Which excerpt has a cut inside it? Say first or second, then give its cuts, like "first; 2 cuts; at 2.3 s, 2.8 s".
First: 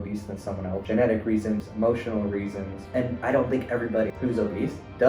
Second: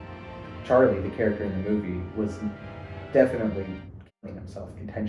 first; 4 cuts; at 0.8 s, 1.7 s, 2.8 s, 4.1 s